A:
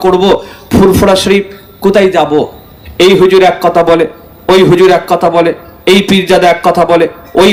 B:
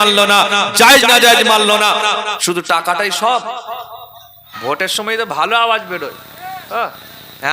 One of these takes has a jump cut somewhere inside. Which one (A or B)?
B